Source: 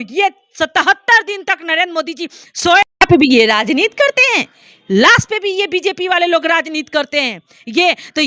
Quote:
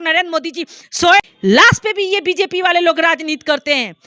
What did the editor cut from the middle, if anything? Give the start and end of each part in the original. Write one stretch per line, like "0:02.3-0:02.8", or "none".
0:02.9-0:04.7